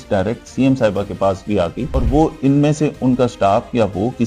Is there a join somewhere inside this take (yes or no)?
yes